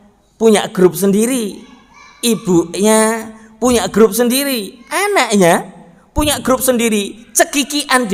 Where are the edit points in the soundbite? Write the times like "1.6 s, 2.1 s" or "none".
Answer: none

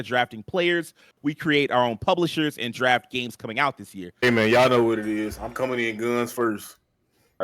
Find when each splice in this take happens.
4.2 s

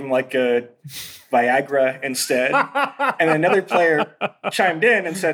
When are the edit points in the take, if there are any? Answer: 4.4 s

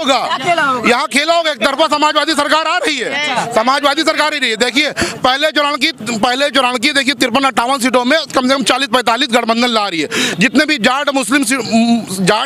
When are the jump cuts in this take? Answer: none

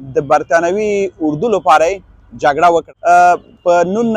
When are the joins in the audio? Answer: 2.9 s

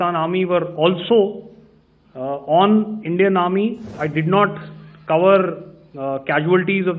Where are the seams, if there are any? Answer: 4.0 s

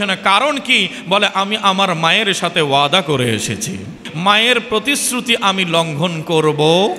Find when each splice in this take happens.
4.1 s

